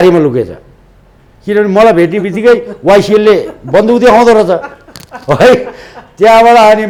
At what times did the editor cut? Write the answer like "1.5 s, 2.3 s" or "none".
none